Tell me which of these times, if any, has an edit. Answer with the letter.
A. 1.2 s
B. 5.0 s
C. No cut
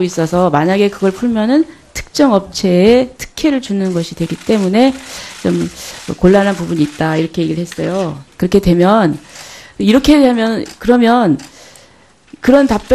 A